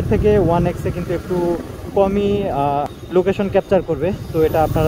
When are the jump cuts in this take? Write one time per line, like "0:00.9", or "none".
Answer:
0:03.0